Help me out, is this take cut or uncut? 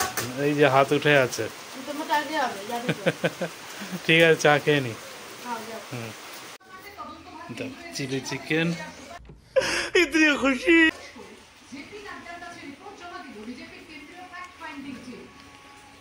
uncut